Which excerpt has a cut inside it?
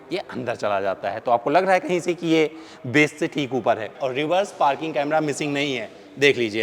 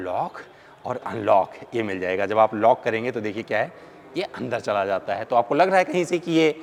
first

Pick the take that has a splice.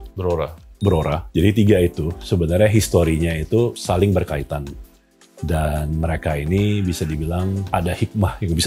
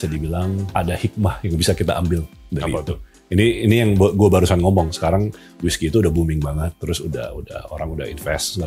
first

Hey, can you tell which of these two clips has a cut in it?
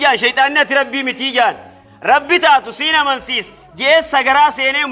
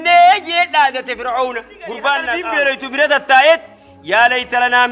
second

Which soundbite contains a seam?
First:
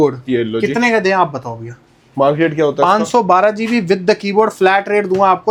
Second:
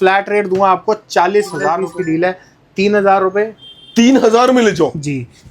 second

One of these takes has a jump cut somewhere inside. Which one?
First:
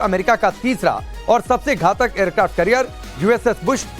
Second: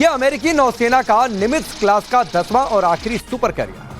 second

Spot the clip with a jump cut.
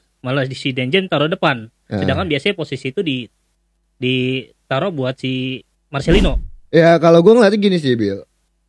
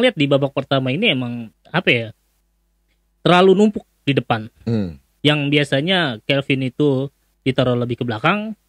first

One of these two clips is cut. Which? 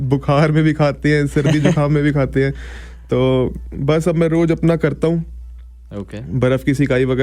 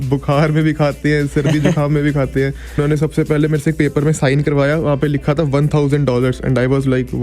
second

